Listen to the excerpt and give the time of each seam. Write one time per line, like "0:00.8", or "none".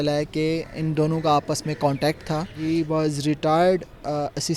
0:02.6